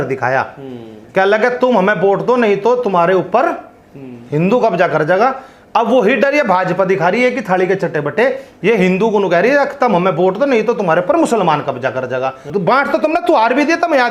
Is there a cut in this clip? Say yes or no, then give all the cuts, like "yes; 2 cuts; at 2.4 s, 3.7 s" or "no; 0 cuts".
yes; 1 cut; at 12.5 s